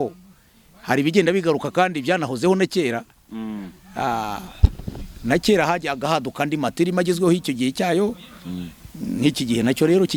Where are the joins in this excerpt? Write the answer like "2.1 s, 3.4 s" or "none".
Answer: none